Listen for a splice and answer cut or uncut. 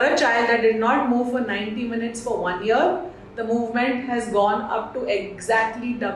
uncut